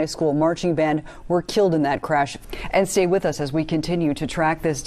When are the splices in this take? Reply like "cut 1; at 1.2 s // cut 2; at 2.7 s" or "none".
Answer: cut 1; at 2.4 s